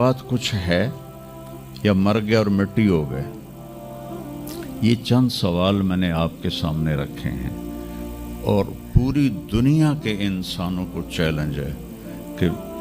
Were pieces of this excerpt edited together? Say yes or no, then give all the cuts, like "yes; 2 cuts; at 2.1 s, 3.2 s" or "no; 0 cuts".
no; 0 cuts